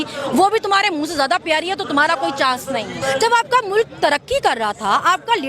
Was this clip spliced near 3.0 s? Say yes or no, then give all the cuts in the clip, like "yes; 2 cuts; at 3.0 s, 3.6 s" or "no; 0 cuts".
yes; 1 cut; at 3.0 s